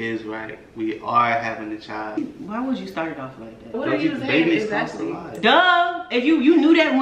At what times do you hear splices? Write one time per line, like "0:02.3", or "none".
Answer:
0:02.2
0:03.7